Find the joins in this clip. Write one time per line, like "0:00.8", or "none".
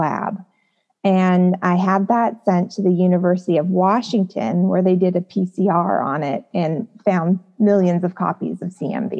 none